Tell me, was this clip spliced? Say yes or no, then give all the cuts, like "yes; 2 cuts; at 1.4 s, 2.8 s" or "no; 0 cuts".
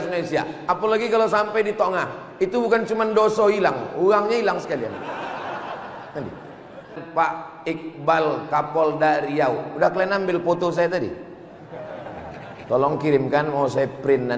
yes; 1 cut; at 7.0 s